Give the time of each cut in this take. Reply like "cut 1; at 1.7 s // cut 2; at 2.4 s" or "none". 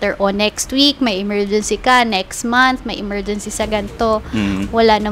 none